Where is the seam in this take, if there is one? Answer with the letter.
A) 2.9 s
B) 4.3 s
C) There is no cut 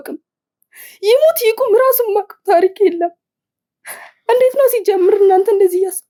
C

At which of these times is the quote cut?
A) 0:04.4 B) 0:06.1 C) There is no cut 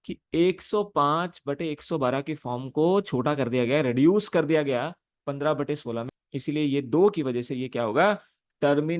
B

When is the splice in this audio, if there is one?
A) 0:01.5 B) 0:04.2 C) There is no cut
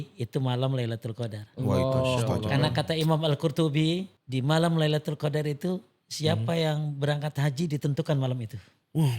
B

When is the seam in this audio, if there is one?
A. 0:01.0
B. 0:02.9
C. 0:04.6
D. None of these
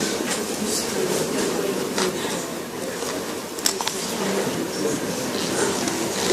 A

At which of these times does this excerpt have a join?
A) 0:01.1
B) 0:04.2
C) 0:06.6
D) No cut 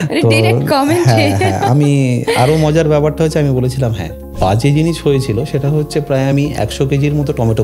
B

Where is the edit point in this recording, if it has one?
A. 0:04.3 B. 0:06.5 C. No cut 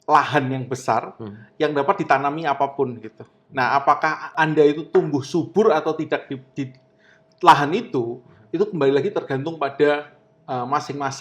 A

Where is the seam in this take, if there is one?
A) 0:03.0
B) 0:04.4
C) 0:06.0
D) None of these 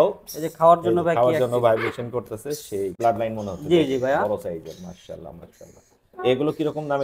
A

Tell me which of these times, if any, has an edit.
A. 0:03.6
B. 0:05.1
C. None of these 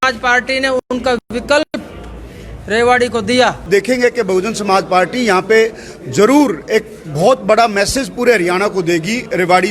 A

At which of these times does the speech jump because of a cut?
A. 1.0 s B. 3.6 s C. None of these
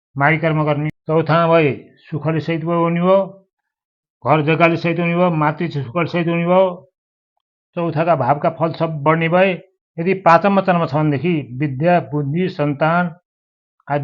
A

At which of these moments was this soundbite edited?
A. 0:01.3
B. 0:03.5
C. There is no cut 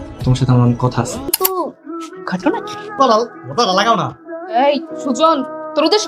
A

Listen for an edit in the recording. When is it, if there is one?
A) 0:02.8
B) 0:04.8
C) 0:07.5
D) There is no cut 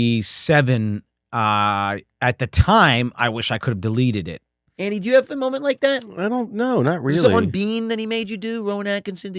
B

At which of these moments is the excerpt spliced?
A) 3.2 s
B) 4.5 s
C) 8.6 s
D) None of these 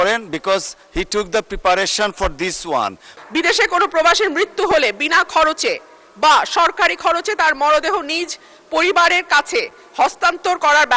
A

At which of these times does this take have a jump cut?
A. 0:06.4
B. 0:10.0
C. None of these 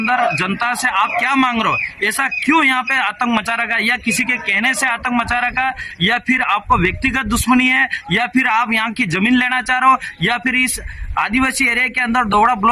C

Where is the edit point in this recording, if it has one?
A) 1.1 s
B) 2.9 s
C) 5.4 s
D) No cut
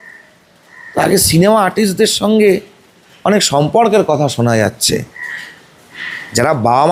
D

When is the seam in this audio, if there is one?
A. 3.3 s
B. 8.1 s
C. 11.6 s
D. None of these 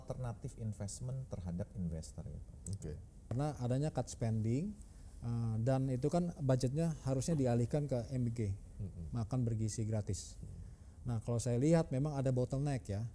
A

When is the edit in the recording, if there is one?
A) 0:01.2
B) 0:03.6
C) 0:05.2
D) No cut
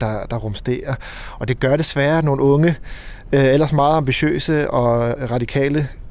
C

